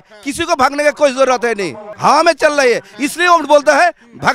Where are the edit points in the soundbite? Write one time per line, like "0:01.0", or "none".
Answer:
0:01.8

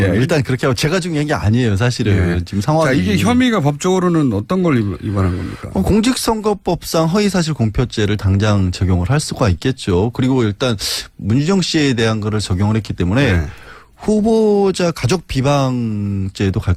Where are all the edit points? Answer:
none

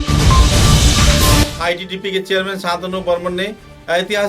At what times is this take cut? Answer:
none

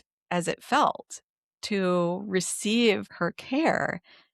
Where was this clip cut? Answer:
0:03.1

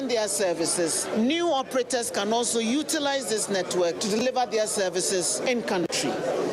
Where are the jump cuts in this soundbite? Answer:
0:01.1
0:05.4

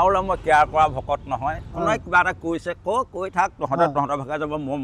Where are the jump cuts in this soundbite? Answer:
none

